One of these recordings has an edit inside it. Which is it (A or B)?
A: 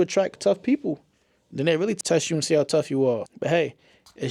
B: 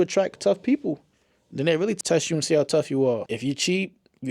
B